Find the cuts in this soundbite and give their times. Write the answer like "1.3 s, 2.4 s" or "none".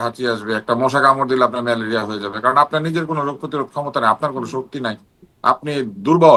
none